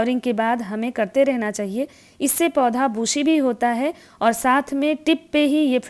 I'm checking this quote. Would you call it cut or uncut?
uncut